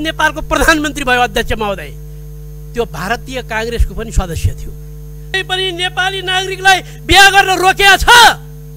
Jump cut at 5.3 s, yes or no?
yes